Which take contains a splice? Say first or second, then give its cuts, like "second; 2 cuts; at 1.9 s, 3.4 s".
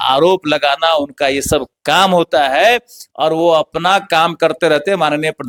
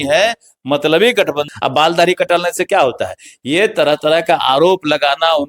second; 1 cut; at 1.5 s